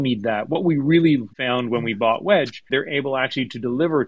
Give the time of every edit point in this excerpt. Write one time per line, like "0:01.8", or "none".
0:01.3
0:02.7